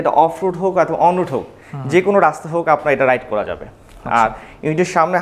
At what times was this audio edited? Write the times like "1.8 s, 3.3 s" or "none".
none